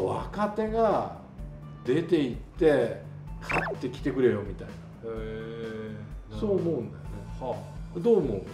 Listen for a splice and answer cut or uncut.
uncut